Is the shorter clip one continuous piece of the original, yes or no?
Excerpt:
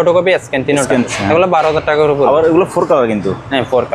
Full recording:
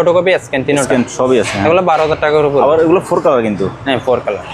no